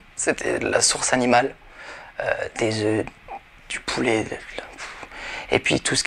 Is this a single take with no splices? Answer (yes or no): no